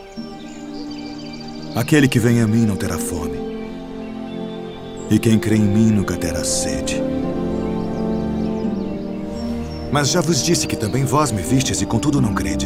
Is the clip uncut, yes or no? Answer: yes